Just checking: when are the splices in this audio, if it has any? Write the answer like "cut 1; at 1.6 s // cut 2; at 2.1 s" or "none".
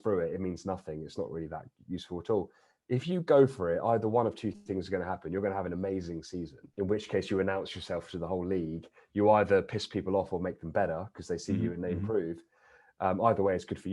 cut 1; at 6.6 s